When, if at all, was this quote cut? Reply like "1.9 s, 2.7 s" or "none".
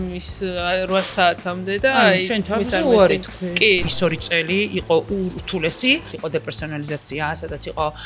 3.8 s, 6.1 s

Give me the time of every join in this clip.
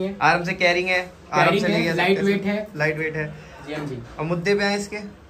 none

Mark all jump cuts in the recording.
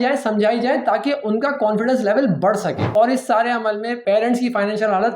2.8 s, 4.0 s

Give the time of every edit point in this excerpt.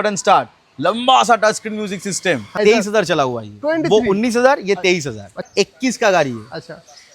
2.6 s, 5.5 s

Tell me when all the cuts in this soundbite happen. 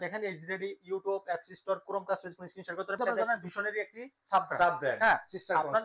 3.1 s

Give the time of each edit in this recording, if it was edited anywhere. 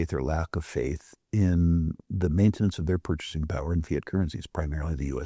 none

